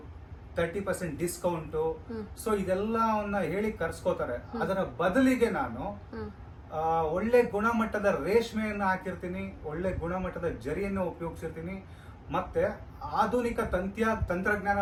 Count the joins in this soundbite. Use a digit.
0